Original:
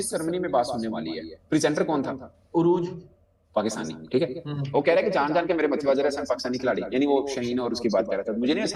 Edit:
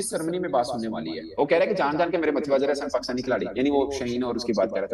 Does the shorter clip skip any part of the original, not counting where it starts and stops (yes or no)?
yes